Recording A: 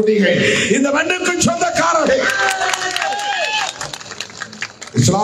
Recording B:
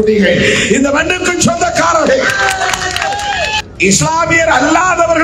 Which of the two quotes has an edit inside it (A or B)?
B